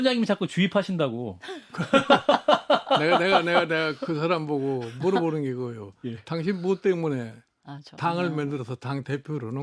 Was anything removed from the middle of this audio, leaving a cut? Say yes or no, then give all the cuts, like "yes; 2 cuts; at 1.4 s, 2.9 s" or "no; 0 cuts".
no; 0 cuts